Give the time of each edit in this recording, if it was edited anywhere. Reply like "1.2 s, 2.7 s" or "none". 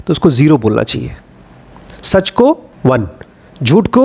2.7 s